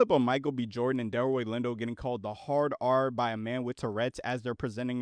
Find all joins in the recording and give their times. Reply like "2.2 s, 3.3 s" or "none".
none